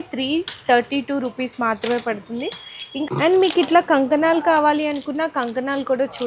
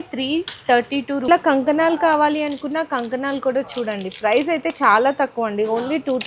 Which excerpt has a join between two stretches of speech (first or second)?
second